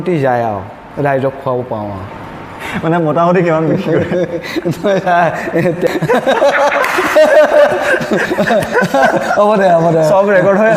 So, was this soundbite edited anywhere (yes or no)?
yes